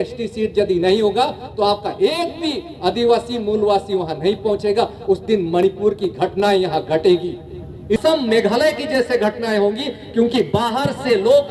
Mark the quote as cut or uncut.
cut